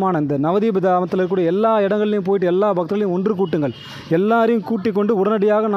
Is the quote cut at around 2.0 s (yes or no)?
no